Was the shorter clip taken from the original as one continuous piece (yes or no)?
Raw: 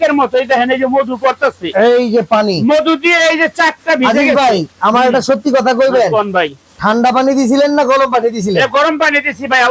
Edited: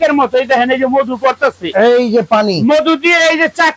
yes